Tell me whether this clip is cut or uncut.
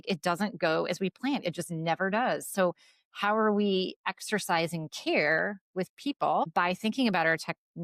cut